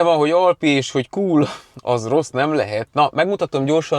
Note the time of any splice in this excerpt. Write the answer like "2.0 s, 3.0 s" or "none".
none